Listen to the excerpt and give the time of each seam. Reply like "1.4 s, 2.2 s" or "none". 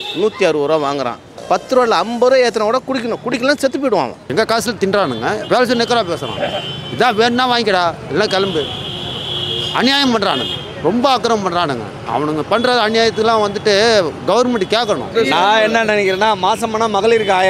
1.4 s, 4.2 s, 15.1 s